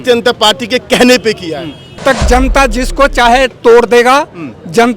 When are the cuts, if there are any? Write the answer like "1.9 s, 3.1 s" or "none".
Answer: 2.0 s